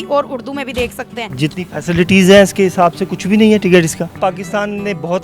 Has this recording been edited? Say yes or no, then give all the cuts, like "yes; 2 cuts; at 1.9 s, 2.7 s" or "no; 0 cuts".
yes; 2 cuts; at 1.2 s, 4.2 s